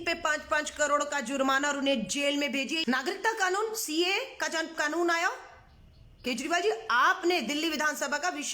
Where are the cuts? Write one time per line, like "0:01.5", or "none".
0:02.8